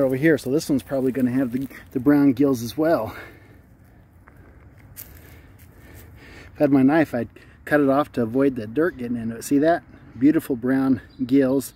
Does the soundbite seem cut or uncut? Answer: uncut